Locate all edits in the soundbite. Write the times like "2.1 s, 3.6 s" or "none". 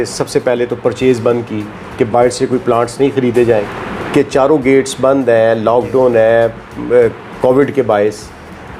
3.7 s